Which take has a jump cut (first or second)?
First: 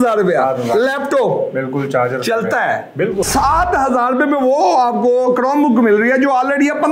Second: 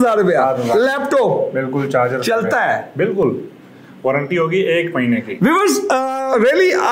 first